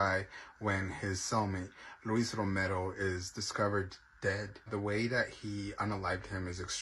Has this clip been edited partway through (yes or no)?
yes